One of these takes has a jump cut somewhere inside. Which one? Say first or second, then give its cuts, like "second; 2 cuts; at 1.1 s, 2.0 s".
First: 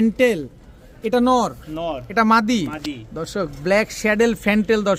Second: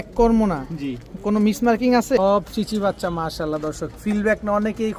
second; 1 cut; at 2.2 s